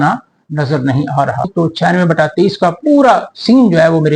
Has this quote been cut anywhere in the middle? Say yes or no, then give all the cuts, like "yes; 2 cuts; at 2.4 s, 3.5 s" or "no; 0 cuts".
yes; 1 cut; at 1.5 s